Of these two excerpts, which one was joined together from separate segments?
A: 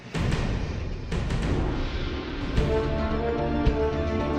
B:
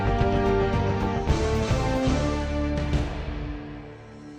B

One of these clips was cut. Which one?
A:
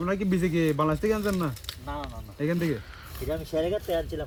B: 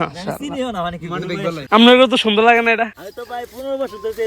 B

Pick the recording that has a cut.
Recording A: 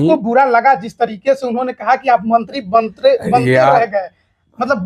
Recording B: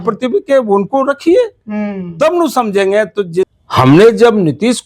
B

